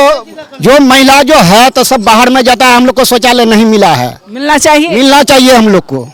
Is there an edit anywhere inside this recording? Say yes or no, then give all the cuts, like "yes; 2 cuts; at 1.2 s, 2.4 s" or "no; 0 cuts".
no; 0 cuts